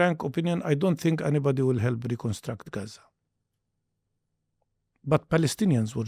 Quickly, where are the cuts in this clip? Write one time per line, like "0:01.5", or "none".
none